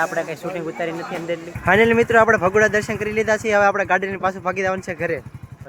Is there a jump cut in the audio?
no; 0 cuts

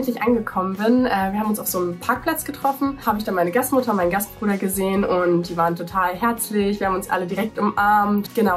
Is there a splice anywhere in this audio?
no; 0 cuts

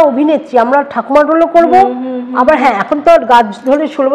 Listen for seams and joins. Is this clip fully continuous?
yes; 0 cuts

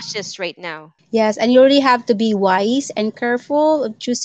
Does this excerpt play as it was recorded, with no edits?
yes; 0 cuts

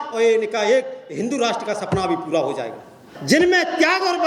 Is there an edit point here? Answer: yes; 1 cut; at 3.1 s

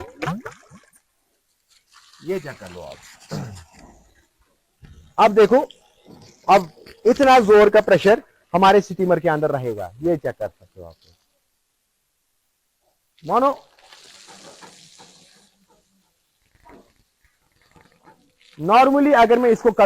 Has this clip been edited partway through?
yes; 1 cut; at 1.0 s

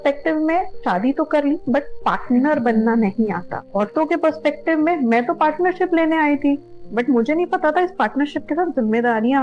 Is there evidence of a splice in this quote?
no; 0 cuts

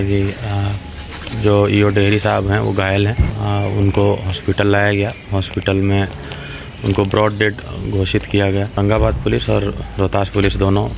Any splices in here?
yes; 2 cuts; at 3.3 s, 8.8 s

